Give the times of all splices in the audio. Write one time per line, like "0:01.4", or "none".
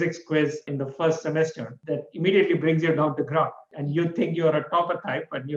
none